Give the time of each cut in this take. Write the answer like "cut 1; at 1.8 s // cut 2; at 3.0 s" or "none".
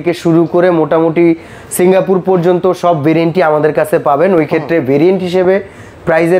none